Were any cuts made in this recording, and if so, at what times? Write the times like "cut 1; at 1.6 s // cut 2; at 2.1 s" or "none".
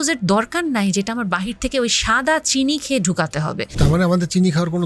cut 1; at 3.6 s